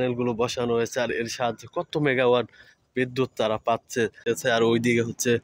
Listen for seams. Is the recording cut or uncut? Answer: cut